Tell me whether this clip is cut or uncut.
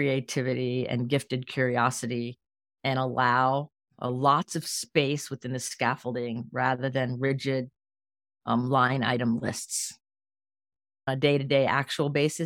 cut